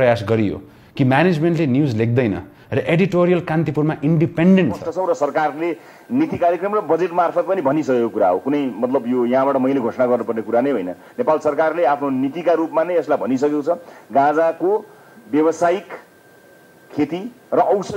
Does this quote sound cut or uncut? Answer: cut